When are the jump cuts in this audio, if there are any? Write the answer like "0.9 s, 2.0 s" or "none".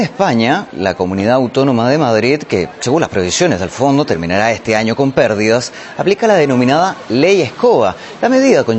1.1 s